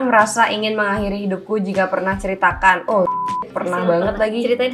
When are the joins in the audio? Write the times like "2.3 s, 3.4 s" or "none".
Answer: none

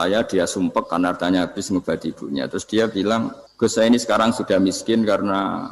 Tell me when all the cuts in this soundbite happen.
3.4 s

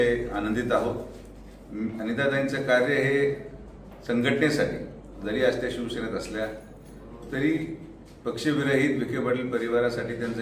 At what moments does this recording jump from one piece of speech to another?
none

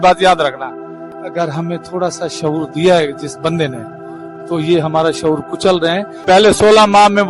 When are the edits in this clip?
1.1 s, 6.2 s

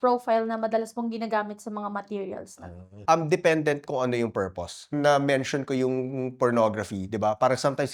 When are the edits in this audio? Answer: 3.0 s, 4.9 s

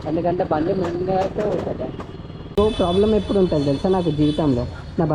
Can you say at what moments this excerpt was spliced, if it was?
2.6 s

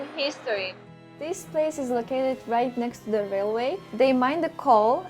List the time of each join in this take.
1.0 s, 3.8 s

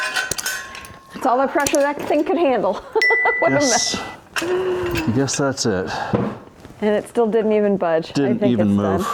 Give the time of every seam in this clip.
none

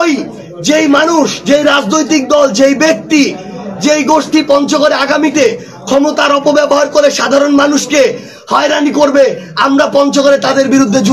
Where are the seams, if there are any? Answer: none

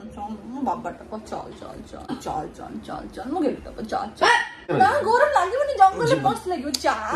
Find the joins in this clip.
2.1 s, 4.6 s

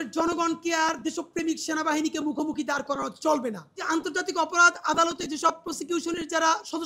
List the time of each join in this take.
3.8 s

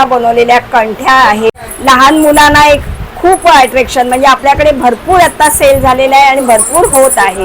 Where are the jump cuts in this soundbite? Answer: 1.7 s

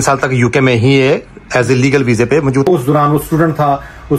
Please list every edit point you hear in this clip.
2.7 s

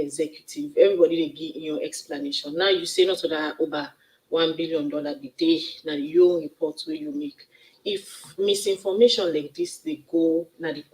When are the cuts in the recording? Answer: 2.5 s

